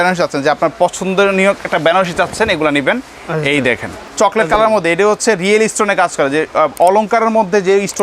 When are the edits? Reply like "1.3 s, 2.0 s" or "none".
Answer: 4.1 s